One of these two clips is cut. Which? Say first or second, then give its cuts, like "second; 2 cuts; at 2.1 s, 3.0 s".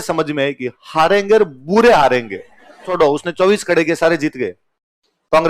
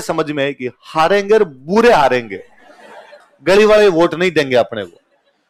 first; 1 cut; at 2.9 s